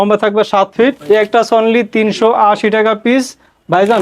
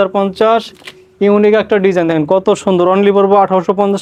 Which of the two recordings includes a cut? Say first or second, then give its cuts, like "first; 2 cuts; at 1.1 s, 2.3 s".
first; 1 cut; at 1.0 s